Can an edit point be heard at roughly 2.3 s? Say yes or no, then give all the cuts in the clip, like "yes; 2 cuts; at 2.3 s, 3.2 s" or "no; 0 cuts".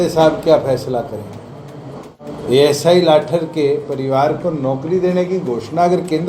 yes; 1 cut; at 2.3 s